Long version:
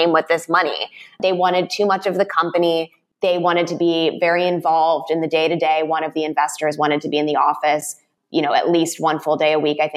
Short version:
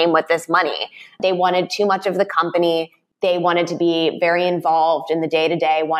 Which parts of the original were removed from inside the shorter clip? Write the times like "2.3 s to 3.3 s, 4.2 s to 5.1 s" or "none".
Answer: none